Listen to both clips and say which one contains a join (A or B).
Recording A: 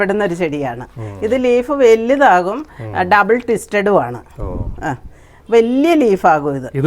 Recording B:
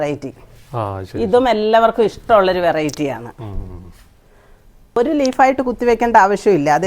B